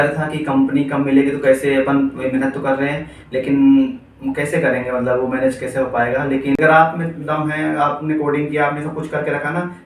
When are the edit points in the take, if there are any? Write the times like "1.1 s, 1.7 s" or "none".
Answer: 6.5 s